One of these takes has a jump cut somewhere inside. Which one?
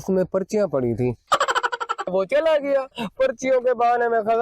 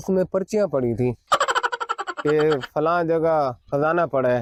first; 1 cut; at 2.1 s

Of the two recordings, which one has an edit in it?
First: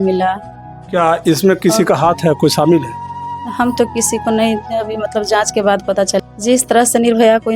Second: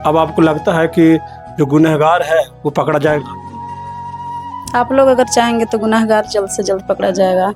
first; 1 cut; at 6.1 s

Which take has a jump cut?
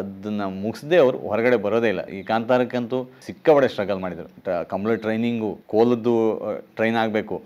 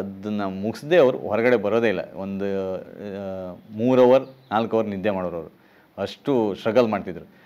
first; 4 cuts; at 2.1 s, 3.2 s, 4.3 s, 5.6 s

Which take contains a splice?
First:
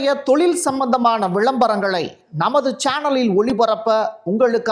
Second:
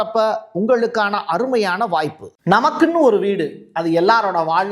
second; 1 cut; at 2.3 s

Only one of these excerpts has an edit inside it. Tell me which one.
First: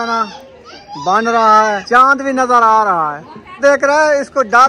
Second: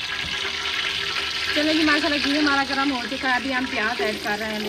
first; 2 cuts; at 1.8 s, 3.6 s

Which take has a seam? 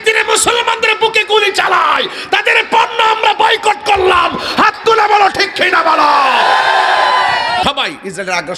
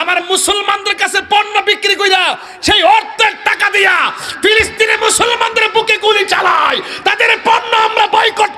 first; 1 cut; at 7.6 s

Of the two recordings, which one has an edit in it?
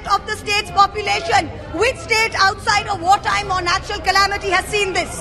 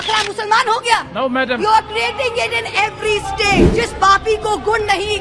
second; 1 cut; at 3.7 s

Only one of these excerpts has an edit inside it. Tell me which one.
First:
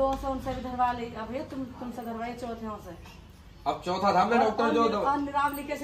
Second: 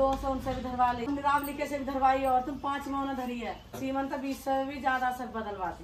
second; 2 cuts; at 1.1 s, 3.8 s

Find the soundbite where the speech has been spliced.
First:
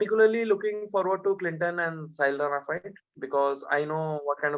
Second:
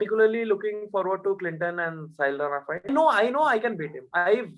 second; 1 cut; at 2.9 s

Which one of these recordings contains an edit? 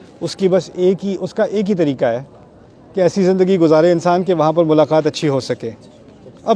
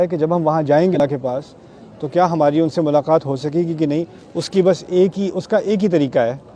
second; 1 cut; at 0.9 s

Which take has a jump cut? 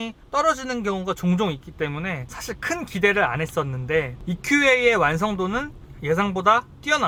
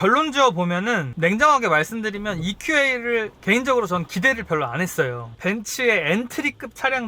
second; 1 cut; at 5.3 s

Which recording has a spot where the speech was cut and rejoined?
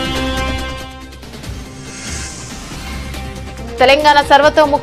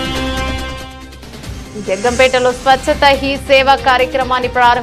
first; 2 cuts; at 1.7 s, 3.8 s

